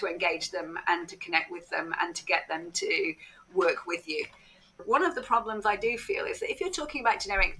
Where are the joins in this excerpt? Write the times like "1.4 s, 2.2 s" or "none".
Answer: 4.8 s